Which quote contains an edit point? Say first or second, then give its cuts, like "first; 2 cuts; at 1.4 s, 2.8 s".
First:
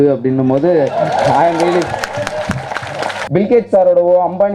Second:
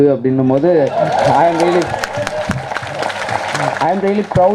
first; 1 cut; at 3.1 s